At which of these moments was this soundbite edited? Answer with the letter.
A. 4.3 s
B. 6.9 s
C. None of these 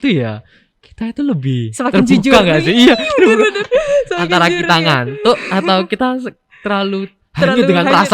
C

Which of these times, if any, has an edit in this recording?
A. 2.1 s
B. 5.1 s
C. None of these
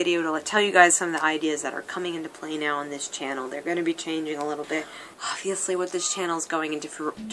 B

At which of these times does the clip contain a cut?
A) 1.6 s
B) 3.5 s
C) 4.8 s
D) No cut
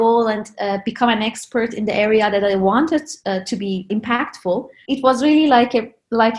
C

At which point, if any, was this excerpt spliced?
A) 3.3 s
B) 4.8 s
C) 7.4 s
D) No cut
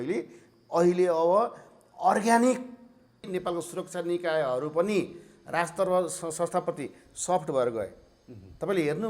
A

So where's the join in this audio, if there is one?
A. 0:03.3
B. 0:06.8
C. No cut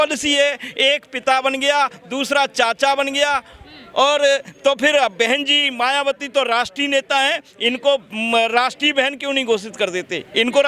C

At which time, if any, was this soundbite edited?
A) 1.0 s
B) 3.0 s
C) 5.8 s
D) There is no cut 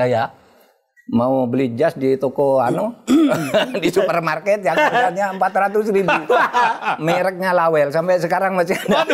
D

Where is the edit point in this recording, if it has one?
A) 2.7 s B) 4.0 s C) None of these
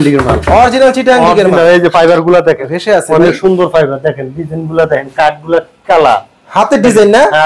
A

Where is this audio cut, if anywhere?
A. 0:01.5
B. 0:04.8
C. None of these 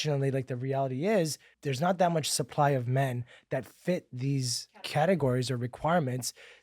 A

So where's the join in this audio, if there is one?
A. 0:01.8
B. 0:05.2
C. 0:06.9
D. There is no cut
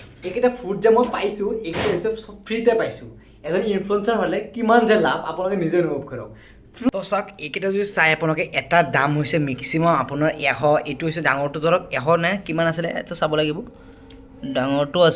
C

